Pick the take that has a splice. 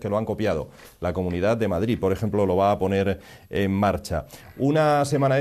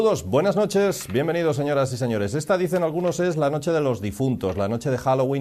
first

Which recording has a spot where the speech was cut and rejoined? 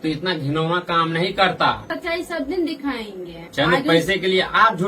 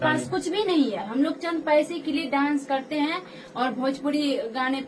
first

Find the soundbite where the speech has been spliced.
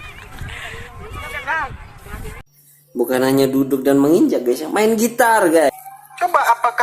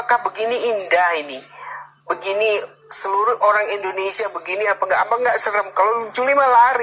first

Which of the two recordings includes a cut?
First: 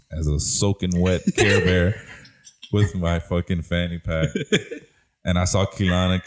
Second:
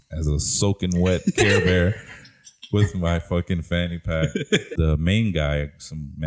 second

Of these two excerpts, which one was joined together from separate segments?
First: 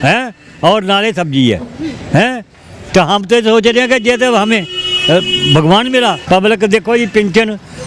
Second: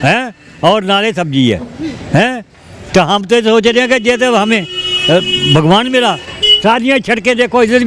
first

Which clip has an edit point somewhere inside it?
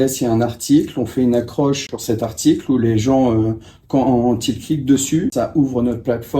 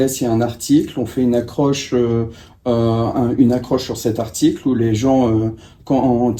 first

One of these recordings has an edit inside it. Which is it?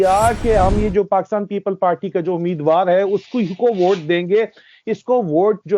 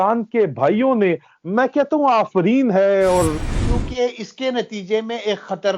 second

